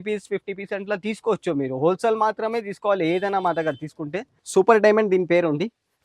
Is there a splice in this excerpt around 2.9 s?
no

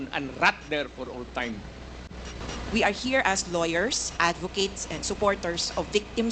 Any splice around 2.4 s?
yes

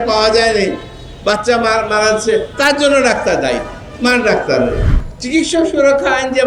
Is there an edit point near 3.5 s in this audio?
no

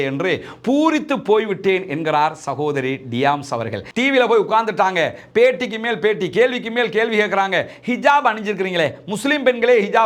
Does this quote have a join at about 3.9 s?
yes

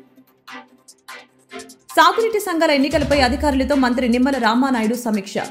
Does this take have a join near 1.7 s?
no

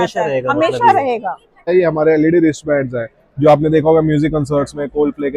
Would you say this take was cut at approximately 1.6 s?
yes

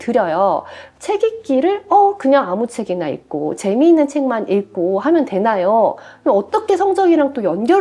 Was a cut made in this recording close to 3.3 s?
no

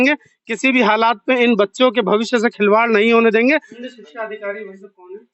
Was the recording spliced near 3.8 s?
yes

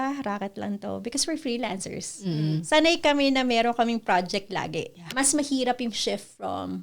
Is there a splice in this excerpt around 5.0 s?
yes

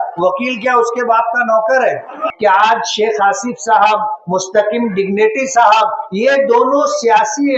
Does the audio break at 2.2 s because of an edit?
yes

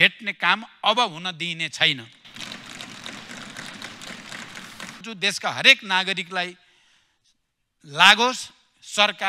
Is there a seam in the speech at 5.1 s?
yes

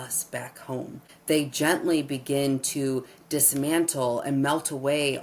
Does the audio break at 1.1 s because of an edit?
yes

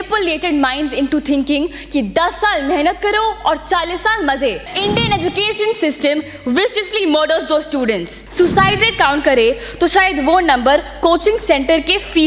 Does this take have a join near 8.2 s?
yes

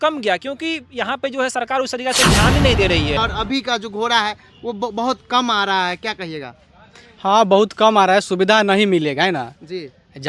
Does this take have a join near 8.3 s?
no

